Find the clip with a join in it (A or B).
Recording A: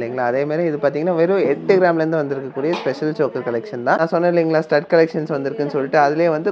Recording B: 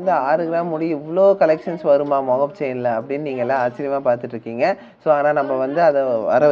A